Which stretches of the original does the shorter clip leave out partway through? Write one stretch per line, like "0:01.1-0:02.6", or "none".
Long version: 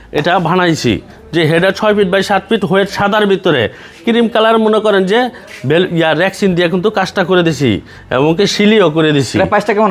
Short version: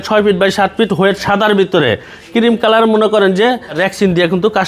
0:05.5-0:06.2